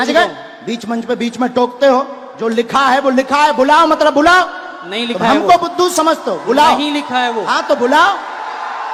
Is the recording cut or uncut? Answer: uncut